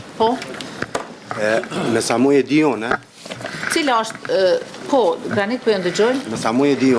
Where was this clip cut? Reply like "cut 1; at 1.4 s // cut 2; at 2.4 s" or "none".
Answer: none